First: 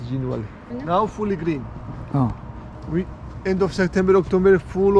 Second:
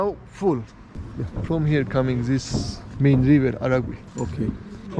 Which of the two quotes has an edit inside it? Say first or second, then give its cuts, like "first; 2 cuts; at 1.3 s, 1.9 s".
second; 1 cut; at 1.0 s